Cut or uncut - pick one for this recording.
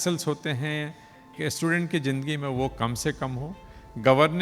cut